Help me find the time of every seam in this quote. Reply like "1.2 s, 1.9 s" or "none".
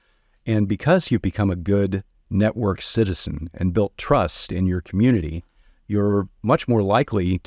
none